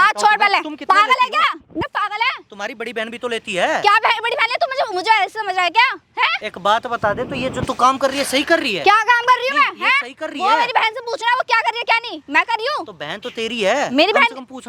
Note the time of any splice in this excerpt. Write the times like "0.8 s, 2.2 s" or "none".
none